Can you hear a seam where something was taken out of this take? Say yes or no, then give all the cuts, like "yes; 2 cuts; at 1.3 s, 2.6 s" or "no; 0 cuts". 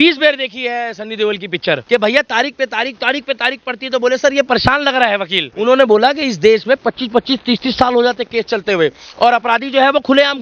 yes; 2 cuts; at 1.8 s, 5.5 s